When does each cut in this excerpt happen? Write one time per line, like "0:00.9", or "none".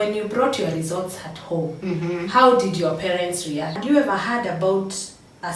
0:03.8